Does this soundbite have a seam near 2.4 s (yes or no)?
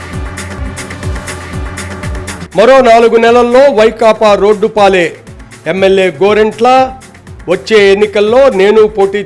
yes